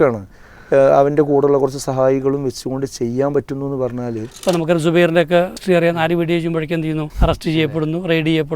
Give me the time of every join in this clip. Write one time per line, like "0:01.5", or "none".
0:04.2
0:05.6
0:07.1

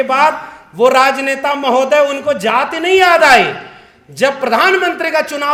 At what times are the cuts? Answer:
none

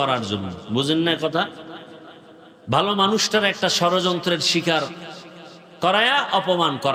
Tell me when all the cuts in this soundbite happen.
none

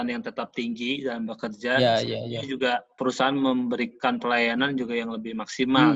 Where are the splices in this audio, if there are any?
0:02.9

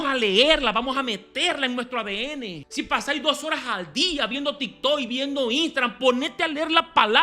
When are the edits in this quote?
0:02.6

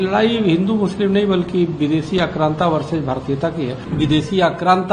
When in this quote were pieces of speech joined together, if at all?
0:03.8

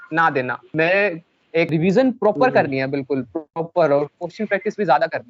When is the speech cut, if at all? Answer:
0:01.7

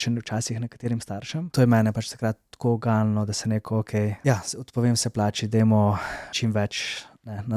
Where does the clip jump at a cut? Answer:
0:01.5
0:04.2
0:06.3

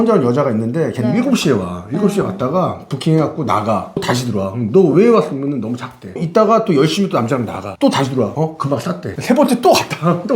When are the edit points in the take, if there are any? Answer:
0:04.0
0:06.2
0:07.6

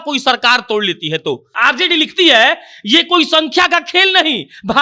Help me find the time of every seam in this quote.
0:01.5

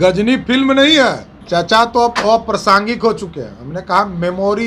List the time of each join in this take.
0:01.3

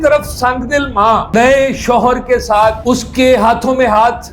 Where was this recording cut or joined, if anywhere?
0:01.3
0:02.8

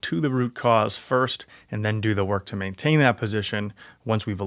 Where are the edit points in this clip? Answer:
0:01.6

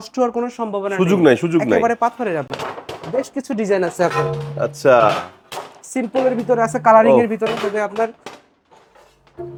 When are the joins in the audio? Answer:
none

